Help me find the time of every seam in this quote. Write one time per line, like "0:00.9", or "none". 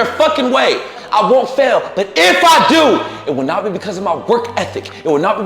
0:01.0